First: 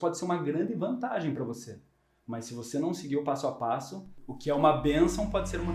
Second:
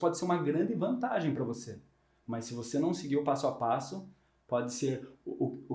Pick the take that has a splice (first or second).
first